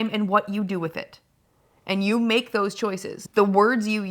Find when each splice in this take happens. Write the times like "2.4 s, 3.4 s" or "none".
3.2 s